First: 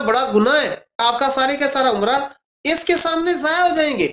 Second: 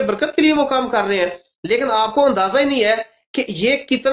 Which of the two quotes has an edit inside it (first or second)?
first